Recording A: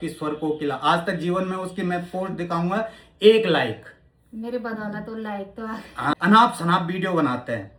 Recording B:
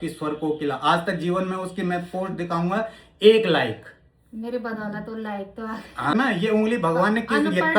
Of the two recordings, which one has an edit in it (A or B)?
B